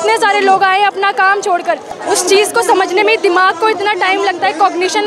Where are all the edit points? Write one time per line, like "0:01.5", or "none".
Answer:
0:01.9

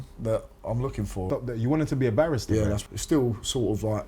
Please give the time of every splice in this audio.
0:01.2
0:02.8

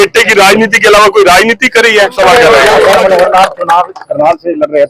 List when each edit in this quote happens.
0:02.1

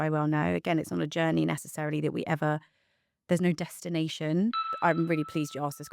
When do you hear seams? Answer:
0:04.7

